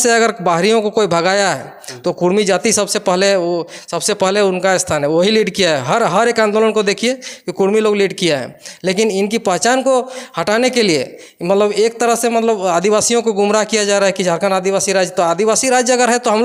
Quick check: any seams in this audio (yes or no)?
no